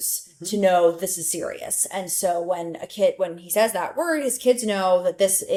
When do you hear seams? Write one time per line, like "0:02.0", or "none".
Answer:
none